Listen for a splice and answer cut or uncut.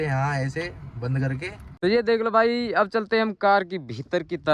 cut